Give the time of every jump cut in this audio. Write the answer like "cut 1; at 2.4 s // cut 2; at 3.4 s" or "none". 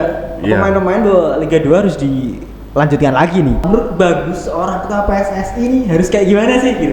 cut 1; at 3.6 s